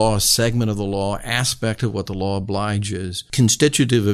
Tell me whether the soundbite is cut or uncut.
cut